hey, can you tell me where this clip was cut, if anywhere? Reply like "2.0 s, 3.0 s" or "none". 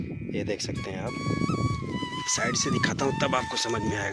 none